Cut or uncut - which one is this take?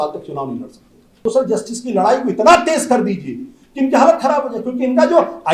cut